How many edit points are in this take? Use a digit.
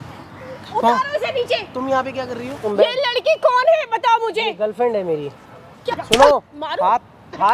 2